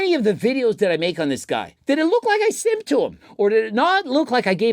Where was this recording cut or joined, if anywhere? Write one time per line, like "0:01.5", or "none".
0:01.7
0:03.2